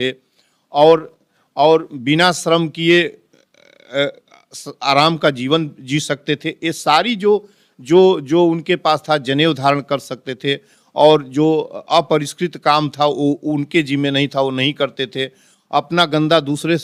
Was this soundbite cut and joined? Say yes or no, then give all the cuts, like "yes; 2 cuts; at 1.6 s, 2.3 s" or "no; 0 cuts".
no; 0 cuts